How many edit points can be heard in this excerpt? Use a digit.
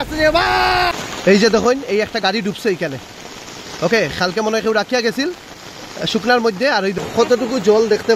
2